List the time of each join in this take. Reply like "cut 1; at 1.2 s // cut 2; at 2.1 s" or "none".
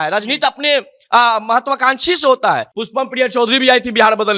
cut 1; at 2.7 s

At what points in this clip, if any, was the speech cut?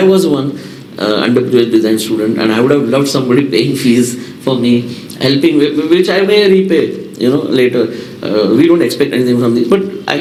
none

